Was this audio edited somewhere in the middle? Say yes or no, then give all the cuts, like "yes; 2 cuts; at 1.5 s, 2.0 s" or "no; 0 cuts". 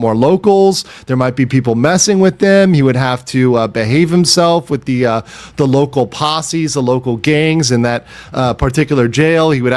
no; 0 cuts